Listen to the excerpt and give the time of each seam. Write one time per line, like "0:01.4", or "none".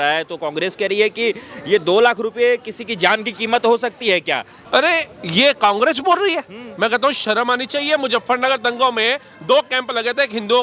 0:04.5